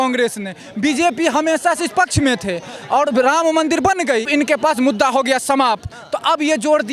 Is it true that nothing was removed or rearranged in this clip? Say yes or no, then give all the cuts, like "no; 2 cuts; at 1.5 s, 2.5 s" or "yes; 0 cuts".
no; 1 cut; at 4.3 s